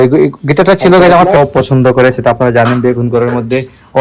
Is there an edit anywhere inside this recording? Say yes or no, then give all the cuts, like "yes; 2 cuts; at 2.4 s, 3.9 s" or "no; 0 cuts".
yes; 1 cut; at 1.4 s